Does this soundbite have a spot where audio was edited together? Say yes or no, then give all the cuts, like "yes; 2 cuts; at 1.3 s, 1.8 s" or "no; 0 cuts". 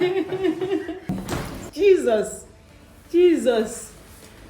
yes; 1 cut; at 1.0 s